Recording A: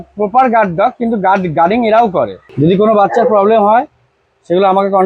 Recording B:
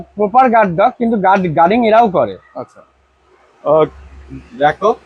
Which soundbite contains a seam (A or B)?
A